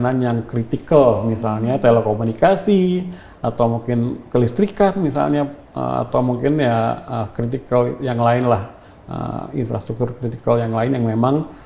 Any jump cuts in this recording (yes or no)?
no